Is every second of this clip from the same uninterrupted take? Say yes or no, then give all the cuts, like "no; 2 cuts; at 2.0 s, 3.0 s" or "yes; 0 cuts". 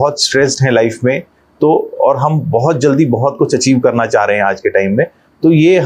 yes; 0 cuts